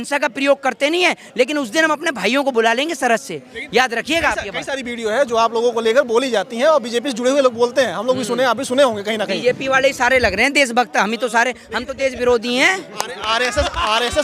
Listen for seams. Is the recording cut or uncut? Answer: uncut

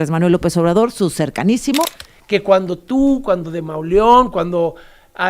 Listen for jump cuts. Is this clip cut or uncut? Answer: cut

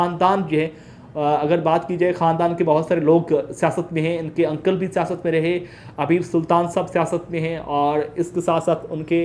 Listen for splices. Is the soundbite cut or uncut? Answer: uncut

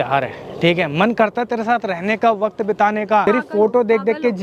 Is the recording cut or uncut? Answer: cut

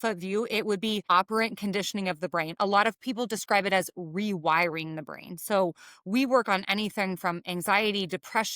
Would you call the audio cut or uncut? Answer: cut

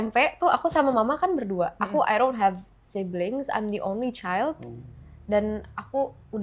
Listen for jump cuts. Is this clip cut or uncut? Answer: uncut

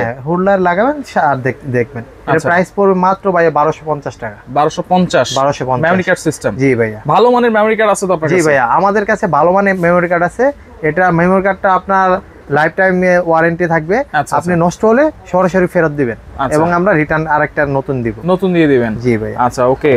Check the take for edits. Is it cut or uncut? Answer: uncut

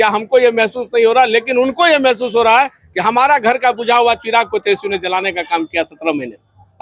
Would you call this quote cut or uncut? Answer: uncut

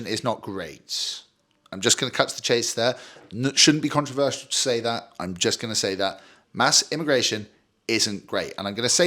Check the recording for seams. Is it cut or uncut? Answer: uncut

